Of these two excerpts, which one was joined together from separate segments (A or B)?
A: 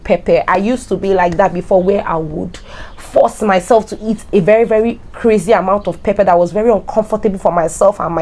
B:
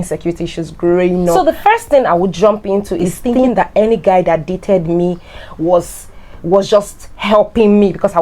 B